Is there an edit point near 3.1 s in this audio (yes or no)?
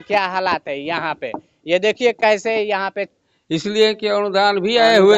yes